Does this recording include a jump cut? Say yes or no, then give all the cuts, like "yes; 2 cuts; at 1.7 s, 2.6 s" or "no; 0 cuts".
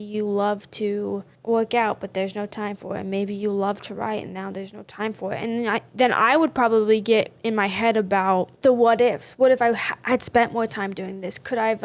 yes; 1 cut; at 8.5 s